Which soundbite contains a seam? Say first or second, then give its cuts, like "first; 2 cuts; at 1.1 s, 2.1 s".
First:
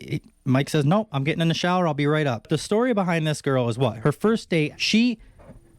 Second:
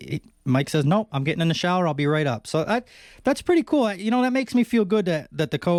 first; 3 cuts; at 2.5 s, 4.0 s, 4.8 s